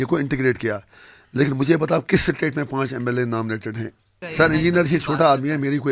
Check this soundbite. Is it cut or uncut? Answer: cut